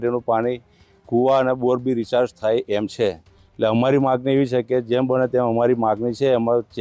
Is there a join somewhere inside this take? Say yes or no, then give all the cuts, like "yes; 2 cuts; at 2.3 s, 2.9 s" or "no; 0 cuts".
no; 0 cuts